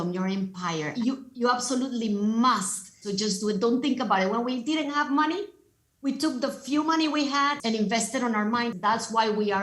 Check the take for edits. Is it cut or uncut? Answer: cut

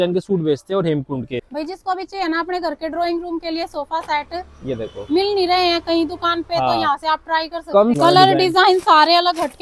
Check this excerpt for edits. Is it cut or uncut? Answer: cut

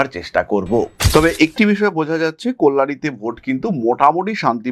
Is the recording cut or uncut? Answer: cut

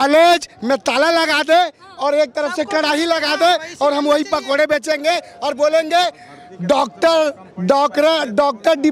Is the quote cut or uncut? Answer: uncut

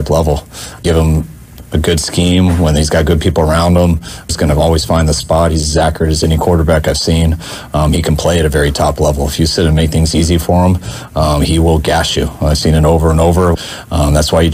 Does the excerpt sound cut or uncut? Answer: cut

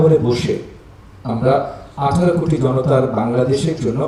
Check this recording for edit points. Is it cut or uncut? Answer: uncut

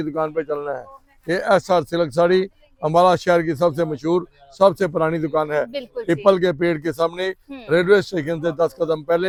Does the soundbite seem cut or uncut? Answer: uncut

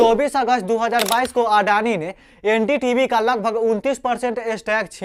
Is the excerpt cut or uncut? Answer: uncut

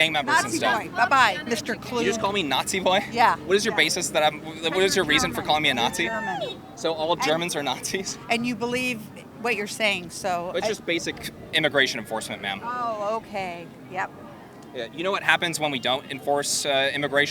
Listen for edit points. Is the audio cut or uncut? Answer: uncut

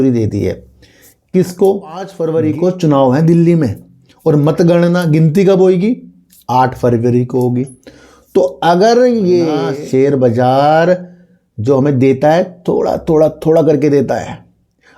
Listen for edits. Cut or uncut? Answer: cut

